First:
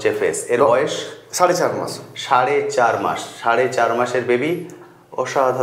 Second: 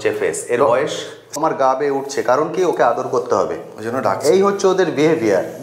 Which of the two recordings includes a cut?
second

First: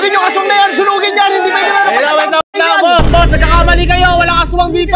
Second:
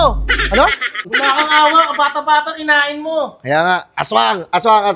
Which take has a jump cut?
second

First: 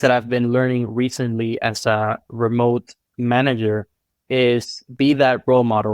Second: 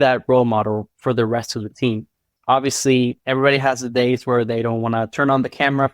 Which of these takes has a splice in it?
second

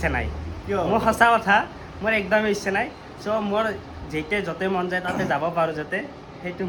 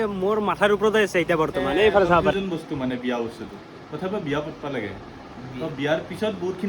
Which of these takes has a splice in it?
second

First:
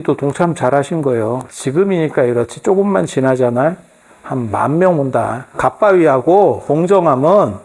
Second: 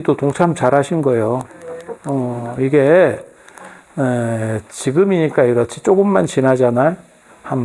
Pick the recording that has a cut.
first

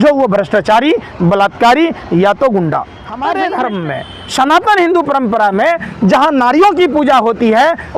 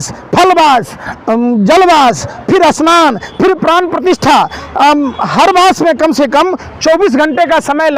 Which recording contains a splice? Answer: first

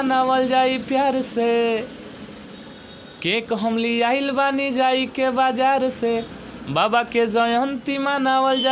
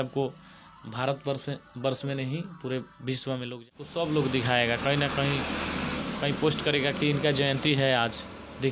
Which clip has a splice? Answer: second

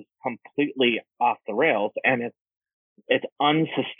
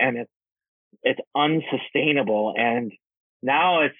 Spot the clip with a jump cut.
first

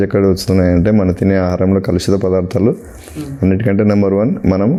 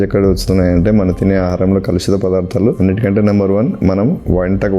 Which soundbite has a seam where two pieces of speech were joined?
second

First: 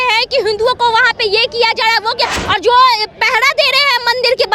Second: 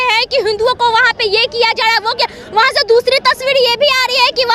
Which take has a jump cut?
first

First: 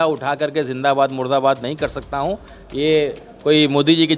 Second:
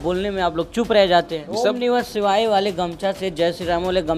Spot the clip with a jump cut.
second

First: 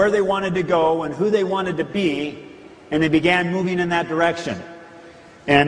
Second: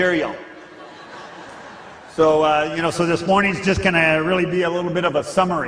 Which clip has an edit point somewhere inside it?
second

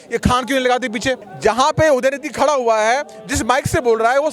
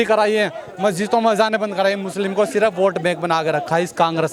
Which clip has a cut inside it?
first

